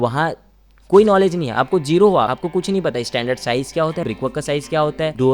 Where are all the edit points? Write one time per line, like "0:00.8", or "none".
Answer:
0:02.3
0:04.0